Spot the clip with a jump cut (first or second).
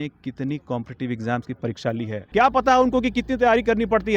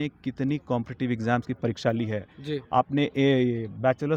first